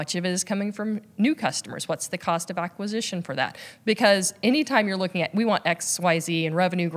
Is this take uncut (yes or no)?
yes